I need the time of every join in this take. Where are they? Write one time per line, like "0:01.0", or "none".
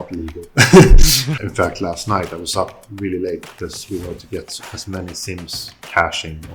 0:01.2